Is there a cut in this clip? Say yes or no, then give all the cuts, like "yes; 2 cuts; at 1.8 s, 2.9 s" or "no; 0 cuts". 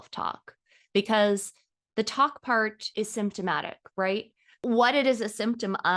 yes; 2 cuts; at 2.8 s, 4.4 s